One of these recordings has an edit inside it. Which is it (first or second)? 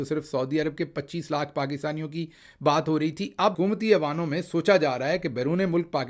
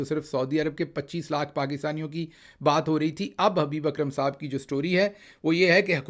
first